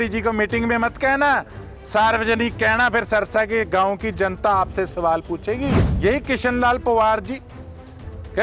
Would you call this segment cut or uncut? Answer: cut